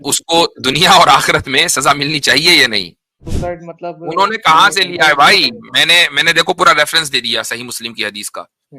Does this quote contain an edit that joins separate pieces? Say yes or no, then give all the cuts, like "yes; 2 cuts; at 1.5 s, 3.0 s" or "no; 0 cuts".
yes; 1 cut; at 3.2 s